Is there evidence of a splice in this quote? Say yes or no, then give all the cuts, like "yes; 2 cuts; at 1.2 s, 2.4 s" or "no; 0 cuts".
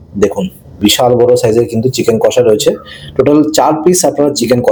no; 0 cuts